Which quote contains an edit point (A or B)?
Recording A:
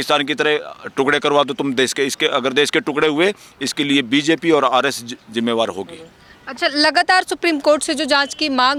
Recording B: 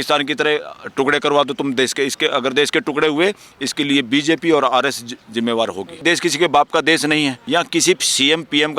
B